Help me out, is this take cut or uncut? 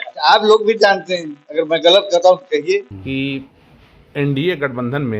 cut